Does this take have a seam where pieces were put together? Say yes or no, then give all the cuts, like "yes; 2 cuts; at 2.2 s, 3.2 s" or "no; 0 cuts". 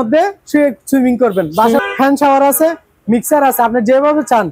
yes; 1 cut; at 1.8 s